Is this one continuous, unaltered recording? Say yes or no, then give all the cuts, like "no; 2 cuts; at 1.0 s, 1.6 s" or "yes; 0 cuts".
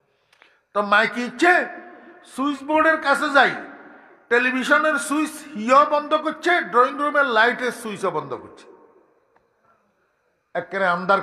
yes; 0 cuts